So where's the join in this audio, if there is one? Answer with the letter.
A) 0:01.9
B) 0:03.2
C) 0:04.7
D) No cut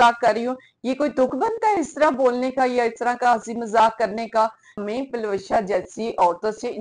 C